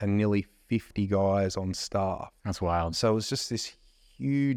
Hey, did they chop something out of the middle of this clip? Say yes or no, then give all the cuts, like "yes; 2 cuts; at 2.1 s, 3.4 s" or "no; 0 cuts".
no; 0 cuts